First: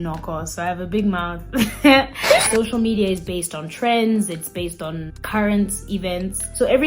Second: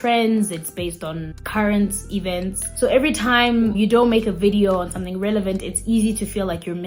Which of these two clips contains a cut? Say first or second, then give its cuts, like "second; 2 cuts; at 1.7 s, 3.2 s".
first; 1 cut; at 2.5 s